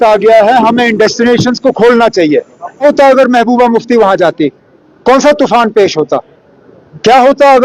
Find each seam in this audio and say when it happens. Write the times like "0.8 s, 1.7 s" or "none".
2.6 s